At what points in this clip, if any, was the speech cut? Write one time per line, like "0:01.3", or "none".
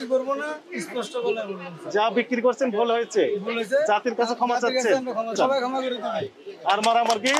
0:05.3